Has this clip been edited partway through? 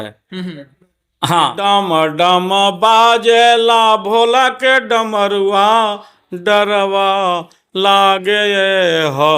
yes; 1 cut; at 1.6 s

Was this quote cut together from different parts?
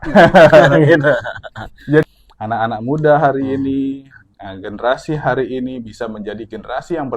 yes; 1 cut; at 2.0 s

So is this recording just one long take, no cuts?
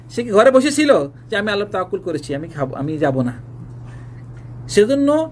yes; 0 cuts

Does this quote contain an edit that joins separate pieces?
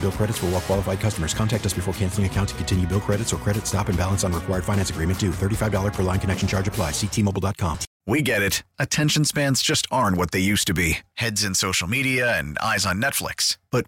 yes; 1 cut; at 7.9 s

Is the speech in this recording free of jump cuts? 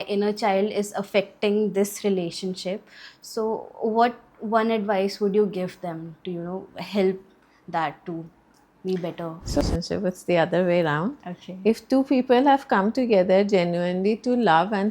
no; 1 cut; at 9.6 s

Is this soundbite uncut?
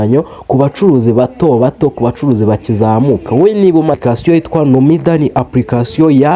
no; 1 cut; at 4.0 s

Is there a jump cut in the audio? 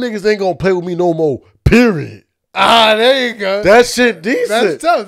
no; 0 cuts

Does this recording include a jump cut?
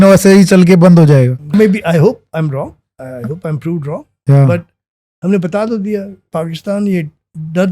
yes; 2 cuts; at 1.5 s, 6.3 s

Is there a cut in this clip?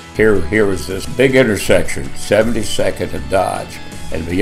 yes; 1 cut; at 1.0 s

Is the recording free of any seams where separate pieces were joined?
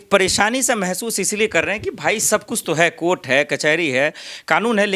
yes; 0 cuts

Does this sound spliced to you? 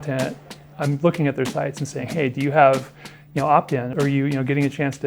yes; 1 cut; at 3.9 s

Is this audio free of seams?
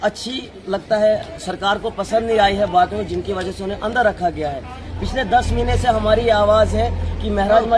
yes; 0 cuts

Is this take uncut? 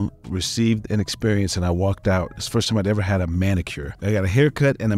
yes; 0 cuts

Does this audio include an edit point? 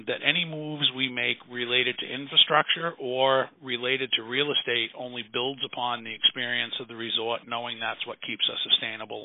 no; 0 cuts

